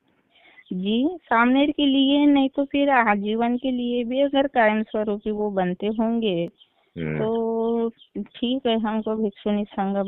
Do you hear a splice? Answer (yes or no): no